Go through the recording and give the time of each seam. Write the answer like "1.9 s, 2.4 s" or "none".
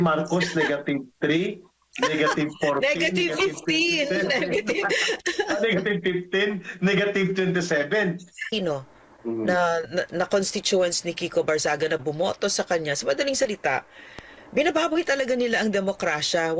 8.5 s